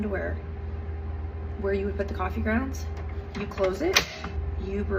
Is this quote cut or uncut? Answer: uncut